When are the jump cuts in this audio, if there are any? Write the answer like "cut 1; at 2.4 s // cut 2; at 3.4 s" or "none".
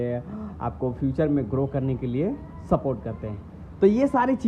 none